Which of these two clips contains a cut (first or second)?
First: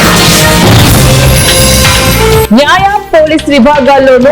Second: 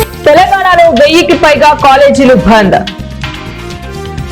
first